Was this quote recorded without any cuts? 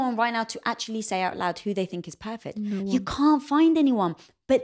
no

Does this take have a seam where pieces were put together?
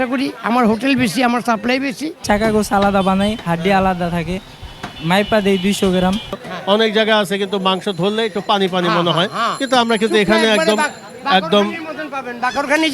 yes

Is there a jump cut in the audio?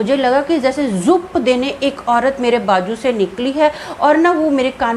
no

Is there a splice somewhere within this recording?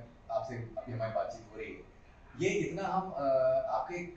no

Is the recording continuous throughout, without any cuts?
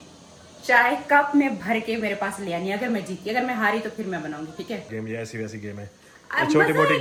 yes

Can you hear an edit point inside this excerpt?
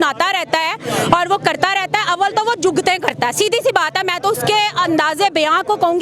no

